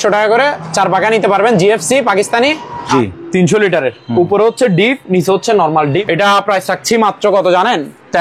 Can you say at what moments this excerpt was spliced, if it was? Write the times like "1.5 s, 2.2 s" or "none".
2.9 s, 6.0 s